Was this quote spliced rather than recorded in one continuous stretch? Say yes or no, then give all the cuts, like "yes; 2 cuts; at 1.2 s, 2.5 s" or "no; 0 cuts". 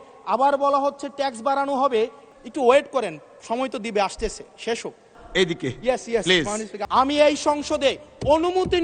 yes; 3 cuts; at 2.2 s, 5.2 s, 6.7 s